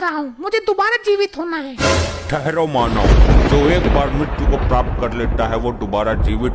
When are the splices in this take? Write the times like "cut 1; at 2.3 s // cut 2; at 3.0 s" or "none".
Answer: none